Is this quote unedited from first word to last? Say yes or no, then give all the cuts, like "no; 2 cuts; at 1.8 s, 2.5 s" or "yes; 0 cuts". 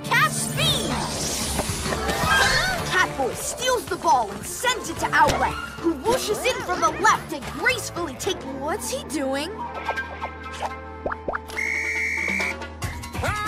no; 1 cut; at 8.4 s